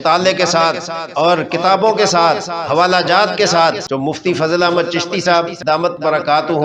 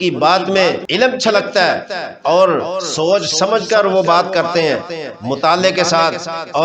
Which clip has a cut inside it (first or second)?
first